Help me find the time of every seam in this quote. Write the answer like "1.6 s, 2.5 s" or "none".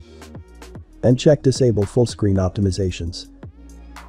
0.9 s